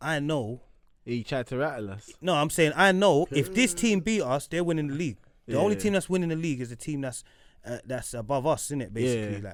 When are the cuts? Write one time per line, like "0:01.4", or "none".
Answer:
none